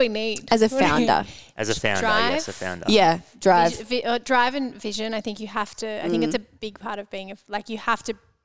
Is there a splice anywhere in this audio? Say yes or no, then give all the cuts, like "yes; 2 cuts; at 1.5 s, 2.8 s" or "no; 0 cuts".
no; 0 cuts